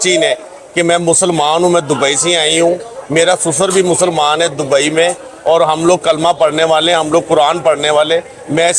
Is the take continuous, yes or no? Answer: yes